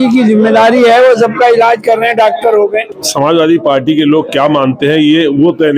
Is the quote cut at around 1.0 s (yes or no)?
no